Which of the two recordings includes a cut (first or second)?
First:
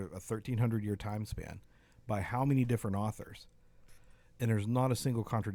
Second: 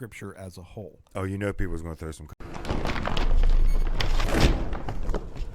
second